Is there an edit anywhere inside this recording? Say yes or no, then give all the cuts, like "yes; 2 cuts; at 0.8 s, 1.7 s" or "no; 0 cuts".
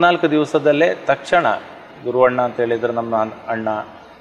no; 0 cuts